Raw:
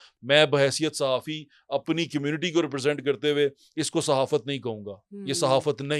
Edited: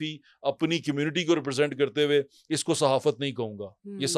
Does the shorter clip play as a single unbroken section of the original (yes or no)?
yes